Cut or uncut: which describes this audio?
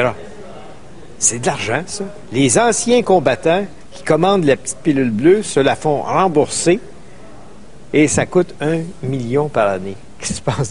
uncut